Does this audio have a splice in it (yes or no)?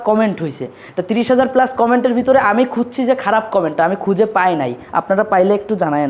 no